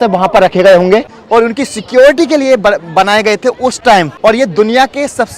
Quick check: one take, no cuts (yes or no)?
no